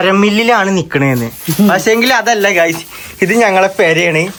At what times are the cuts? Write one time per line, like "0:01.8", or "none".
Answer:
none